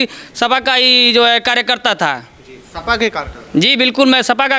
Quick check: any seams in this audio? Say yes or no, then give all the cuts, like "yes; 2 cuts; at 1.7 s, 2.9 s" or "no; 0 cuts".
no; 0 cuts